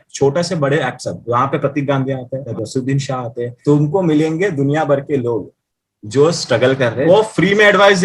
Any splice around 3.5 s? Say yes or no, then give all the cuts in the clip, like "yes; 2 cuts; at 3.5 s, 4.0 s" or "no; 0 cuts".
yes; 3 cuts; at 2.5 s, 3.5 s, 7.0 s